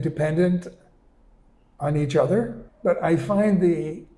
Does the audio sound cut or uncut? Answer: cut